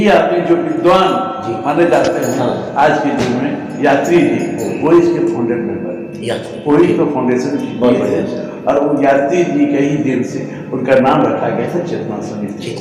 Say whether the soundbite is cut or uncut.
uncut